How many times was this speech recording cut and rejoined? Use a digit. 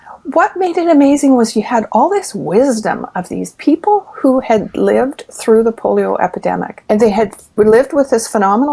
1